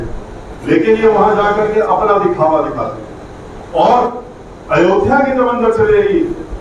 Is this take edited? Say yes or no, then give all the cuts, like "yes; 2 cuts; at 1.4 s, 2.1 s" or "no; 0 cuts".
no; 0 cuts